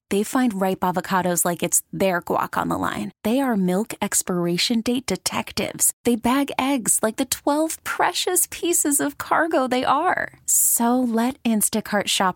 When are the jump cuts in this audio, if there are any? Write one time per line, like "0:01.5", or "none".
none